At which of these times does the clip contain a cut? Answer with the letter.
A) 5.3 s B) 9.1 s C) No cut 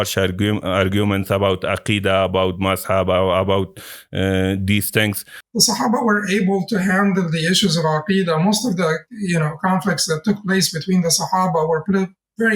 A